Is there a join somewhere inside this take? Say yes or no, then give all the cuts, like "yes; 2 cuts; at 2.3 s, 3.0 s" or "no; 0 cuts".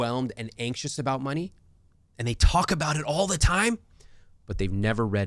no; 0 cuts